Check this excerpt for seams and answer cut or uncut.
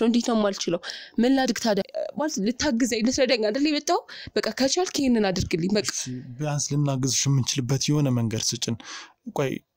cut